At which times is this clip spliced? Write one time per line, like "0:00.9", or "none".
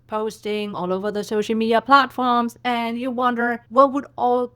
0:03.6